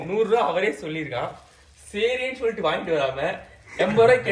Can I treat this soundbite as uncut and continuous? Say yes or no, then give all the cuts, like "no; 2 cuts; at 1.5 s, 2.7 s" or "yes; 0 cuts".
yes; 0 cuts